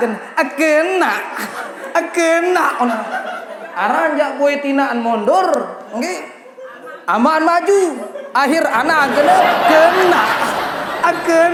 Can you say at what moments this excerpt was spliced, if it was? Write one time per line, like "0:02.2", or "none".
none